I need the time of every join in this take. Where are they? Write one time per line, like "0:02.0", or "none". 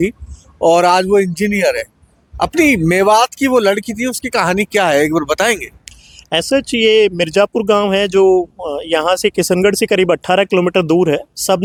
none